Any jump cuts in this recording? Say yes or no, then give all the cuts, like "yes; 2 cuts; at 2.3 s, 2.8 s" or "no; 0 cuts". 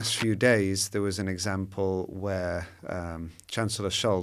no; 0 cuts